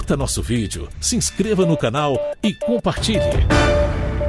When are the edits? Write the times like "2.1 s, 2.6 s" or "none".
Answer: 3.0 s